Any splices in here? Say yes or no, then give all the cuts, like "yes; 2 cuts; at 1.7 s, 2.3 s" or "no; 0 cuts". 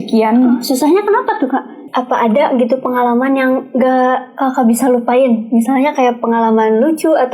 yes; 1 cut; at 1.8 s